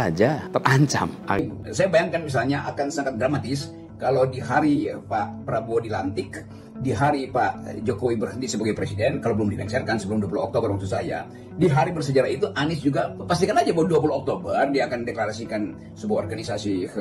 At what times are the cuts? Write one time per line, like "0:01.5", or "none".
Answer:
0:01.4